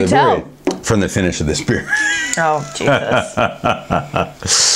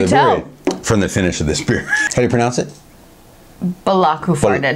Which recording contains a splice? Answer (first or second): second